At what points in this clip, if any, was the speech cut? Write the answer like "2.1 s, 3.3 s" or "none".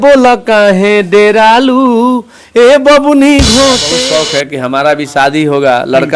3.9 s